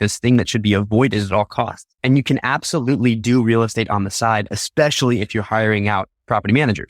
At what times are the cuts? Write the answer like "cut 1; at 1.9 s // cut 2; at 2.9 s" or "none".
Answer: cut 1; at 1.9 s